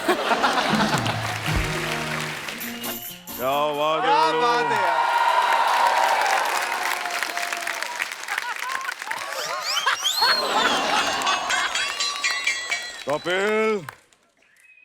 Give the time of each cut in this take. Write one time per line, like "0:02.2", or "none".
0:02.8